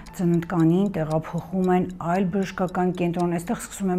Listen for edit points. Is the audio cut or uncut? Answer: uncut